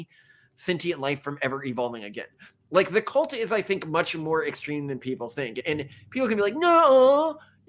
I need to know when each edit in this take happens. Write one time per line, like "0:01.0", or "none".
none